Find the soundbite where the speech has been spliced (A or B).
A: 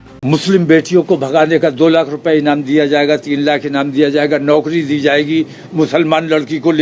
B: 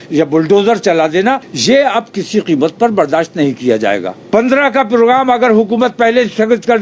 B